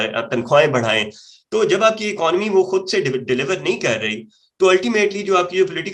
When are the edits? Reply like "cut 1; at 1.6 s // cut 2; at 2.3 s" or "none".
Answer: none